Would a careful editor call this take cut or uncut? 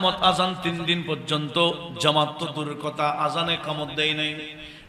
uncut